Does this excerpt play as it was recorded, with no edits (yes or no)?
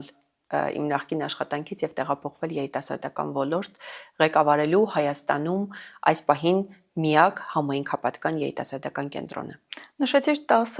yes